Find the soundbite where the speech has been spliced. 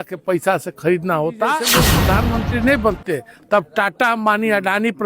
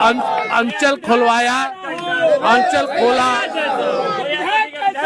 first; 1 cut; at 1.9 s

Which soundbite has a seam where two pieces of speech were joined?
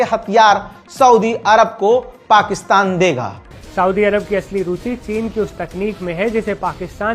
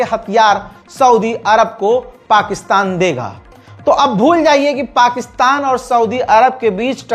first; 1 cut; at 3.6 s

